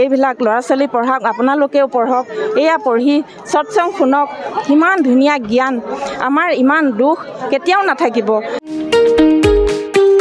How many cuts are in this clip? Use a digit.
1